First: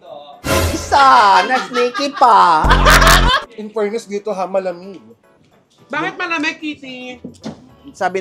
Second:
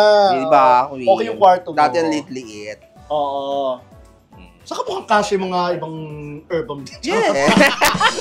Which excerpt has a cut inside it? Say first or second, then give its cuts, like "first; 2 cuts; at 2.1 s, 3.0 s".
first; 1 cut; at 3.5 s